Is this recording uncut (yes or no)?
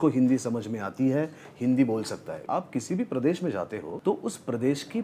no